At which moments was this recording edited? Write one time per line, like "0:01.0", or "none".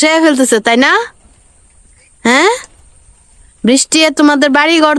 none